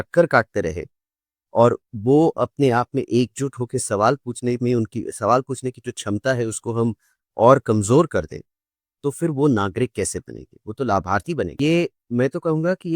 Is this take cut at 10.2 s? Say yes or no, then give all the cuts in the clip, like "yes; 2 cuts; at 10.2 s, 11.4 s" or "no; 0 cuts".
no; 1 cut; at 11.5 s